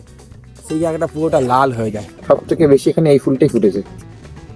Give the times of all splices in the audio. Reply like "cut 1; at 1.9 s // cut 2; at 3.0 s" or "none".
cut 1; at 2.1 s